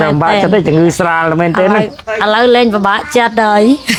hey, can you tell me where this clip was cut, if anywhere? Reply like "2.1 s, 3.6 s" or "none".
none